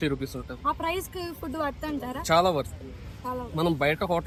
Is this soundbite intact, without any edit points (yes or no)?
yes